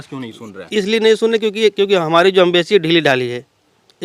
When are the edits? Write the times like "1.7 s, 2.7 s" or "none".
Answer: none